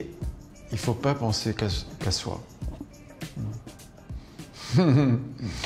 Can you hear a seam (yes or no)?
yes